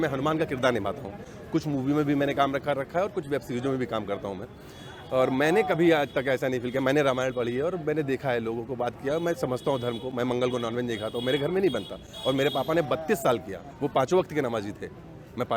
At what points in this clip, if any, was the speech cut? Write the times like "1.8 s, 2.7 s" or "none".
none